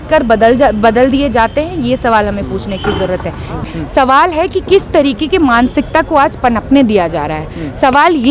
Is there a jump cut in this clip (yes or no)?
yes